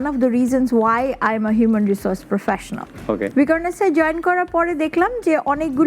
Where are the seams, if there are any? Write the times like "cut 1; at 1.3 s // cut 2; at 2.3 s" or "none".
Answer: none